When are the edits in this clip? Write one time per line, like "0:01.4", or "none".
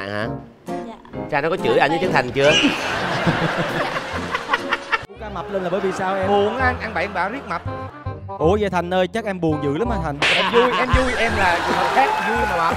0:05.3